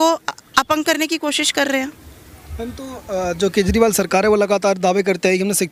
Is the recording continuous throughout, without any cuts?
yes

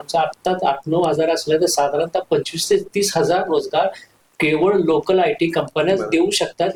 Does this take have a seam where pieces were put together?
no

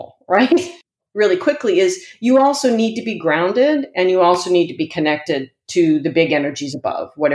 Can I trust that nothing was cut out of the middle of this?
no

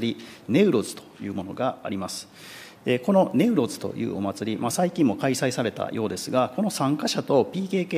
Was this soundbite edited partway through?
no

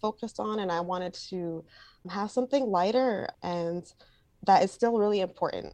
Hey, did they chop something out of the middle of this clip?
yes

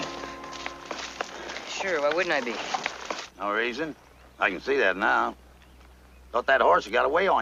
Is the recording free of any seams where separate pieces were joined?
yes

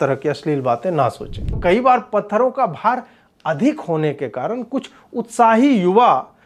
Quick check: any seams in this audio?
yes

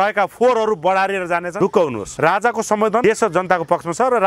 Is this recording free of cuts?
no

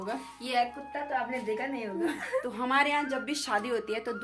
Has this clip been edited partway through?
yes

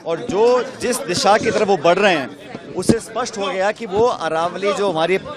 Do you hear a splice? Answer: no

